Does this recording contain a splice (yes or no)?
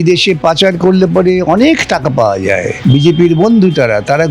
yes